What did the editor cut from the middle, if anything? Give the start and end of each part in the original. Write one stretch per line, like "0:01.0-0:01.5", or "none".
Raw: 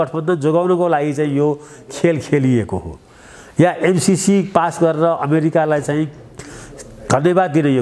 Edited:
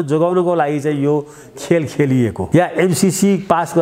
0:02.7-0:03.5